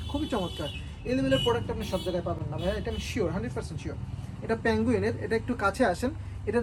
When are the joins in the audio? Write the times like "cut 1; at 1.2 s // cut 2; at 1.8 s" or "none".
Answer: none